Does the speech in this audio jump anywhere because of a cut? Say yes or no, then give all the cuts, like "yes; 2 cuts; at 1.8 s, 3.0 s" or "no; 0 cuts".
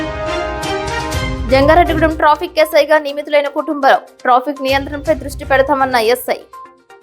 yes; 1 cut; at 1.1 s